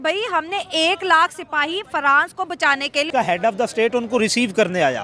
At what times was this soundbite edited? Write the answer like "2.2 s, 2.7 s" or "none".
3.1 s